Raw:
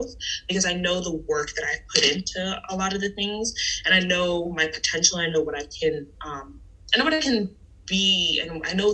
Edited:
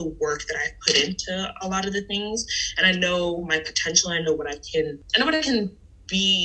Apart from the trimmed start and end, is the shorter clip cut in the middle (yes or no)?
yes